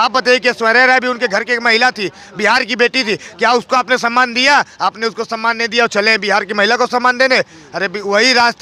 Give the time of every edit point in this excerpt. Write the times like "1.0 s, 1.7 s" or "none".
none